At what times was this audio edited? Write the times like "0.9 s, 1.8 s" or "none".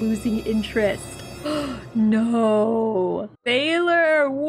none

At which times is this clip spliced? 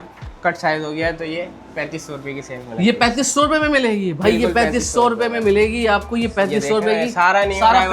none

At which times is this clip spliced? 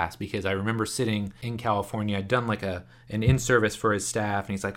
1.4 s

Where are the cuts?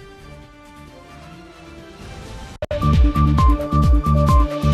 2.6 s

